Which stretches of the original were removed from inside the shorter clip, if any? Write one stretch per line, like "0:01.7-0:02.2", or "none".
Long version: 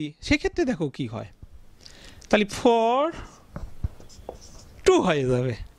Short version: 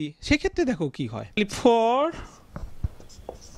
0:01.4-0:02.4

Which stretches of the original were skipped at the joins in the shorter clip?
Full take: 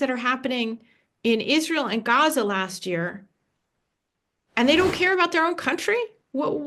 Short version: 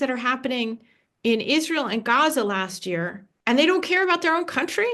0:03.2-0:04.3

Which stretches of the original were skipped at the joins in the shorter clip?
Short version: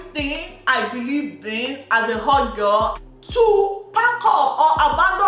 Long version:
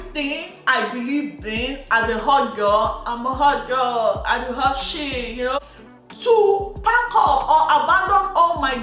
0:03.0-0:06.0

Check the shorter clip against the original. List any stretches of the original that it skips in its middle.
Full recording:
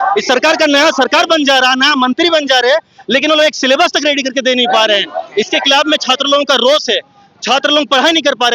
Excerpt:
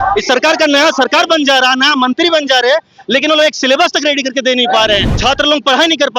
0:05.1-0:07.4

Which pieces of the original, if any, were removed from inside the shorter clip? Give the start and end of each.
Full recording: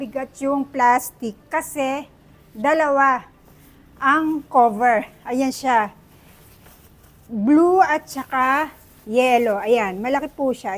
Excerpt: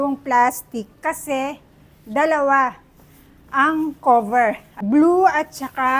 0:05.2-0:07.2

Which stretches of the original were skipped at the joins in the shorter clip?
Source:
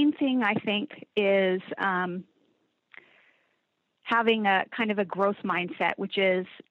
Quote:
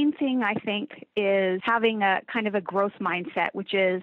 0:01.6-0:04.1

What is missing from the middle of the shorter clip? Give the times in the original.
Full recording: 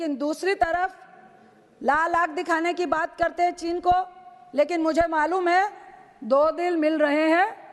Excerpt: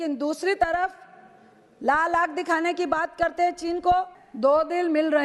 0:04.2-0:06.1

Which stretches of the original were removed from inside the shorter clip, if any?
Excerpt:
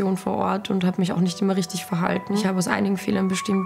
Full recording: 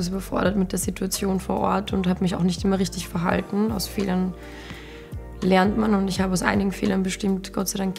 0:03.6-0:06.2

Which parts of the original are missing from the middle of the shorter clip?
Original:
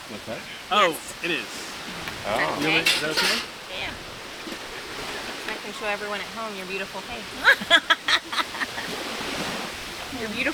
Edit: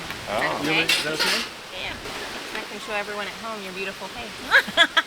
0:04.0-0:05.0

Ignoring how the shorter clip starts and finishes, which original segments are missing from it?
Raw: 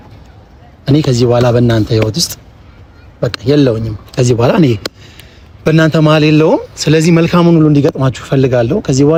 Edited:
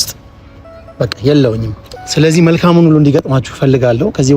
0:04.2-0:06.6

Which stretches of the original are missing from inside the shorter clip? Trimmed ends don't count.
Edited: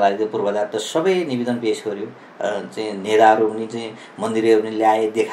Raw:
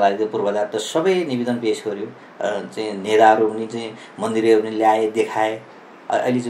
none

